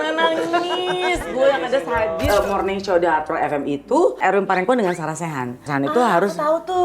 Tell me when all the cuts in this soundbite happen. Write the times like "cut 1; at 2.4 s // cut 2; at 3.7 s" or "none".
cut 1; at 2.2 s // cut 2; at 5.7 s